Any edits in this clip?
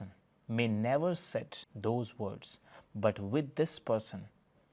no; 0 cuts

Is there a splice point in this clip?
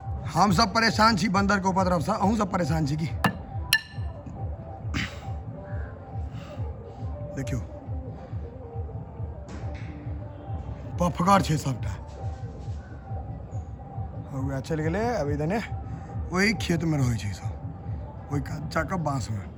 no; 0 cuts

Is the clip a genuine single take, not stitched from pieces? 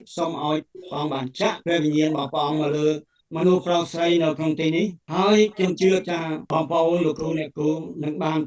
no; 2 cuts; at 5.0 s, 6.4 s

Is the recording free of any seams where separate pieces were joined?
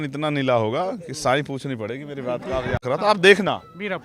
no; 1 cut; at 2.8 s

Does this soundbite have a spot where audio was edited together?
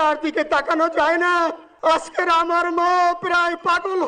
yes; 1 cut; at 1.7 s

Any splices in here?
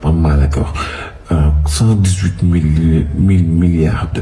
no; 0 cuts

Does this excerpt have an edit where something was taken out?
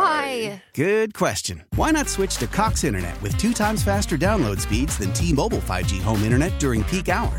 no; 0 cuts

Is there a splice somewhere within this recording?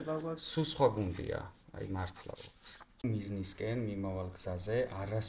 yes; 1 cut; at 3.0 s

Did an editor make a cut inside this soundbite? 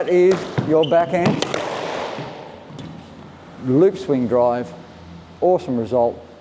no; 0 cuts

